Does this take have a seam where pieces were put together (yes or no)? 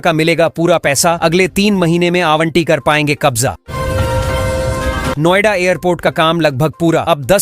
yes